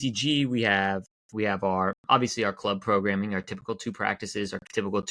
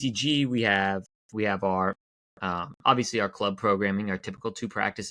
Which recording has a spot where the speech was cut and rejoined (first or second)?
first